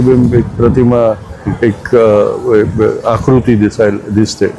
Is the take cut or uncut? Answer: uncut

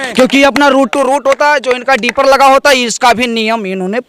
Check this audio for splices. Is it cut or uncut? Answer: uncut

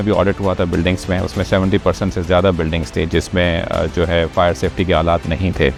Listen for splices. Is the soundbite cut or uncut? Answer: uncut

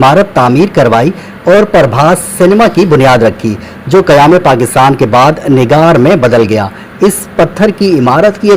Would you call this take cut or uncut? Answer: uncut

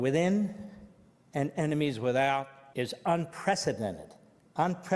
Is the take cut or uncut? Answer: cut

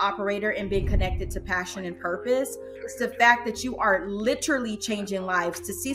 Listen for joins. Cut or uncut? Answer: cut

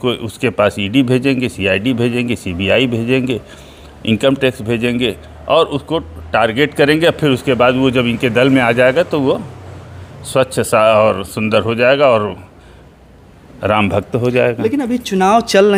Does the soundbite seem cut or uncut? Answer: uncut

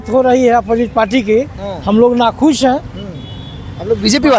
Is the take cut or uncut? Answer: uncut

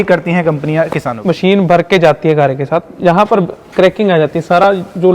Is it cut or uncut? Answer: cut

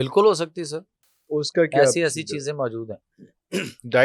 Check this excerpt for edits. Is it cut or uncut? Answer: uncut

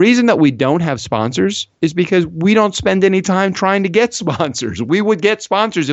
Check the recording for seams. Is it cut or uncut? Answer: uncut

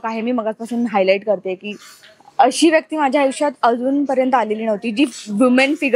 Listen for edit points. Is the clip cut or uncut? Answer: uncut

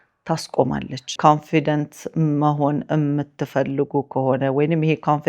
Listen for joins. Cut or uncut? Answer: cut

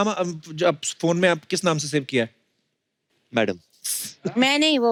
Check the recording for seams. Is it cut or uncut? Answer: uncut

